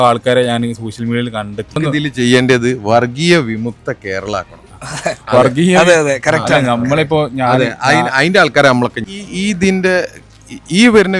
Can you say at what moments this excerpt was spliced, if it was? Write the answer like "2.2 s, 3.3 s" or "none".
1.8 s